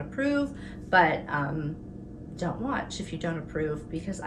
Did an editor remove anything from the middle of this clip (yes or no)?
no